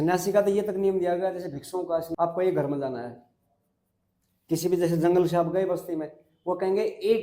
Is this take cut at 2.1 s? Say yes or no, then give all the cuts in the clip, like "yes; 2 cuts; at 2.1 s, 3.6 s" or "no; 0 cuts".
yes; 1 cut; at 2.1 s